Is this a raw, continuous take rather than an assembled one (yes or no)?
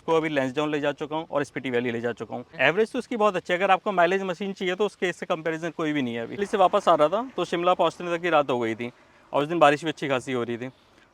no